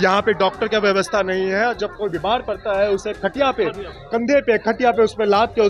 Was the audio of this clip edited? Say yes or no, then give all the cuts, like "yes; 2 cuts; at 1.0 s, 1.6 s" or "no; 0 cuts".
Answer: no; 0 cuts